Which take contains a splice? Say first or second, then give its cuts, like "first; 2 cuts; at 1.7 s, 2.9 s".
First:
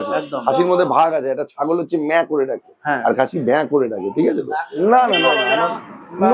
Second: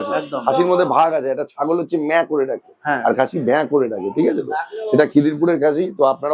first; 1 cut; at 4.6 s